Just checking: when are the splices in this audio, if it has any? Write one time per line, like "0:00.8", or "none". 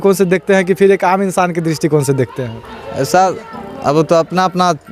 none